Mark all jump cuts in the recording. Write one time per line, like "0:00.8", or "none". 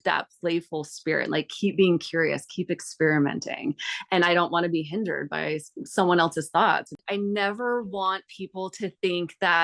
0:07.0